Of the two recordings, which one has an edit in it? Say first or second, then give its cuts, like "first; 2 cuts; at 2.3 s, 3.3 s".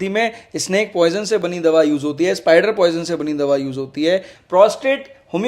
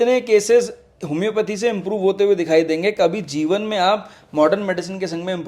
first; 1 cut; at 4.3 s